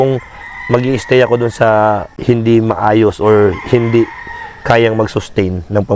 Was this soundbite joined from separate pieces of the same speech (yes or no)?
yes